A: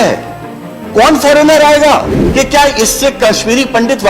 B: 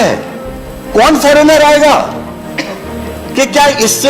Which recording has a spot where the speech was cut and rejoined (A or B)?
A